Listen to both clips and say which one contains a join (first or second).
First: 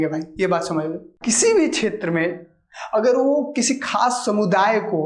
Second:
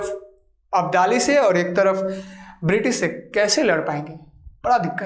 first